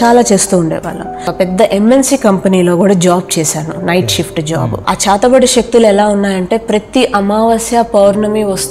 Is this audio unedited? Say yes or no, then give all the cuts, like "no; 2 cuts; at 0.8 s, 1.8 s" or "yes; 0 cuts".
no; 2 cuts; at 1.2 s, 4.8 s